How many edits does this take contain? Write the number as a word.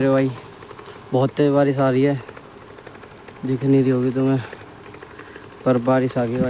zero